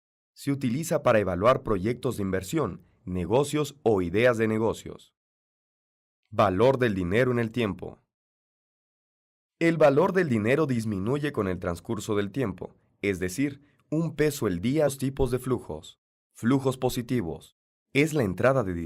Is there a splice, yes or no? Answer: no